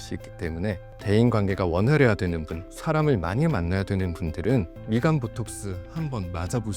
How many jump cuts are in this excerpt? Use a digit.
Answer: 2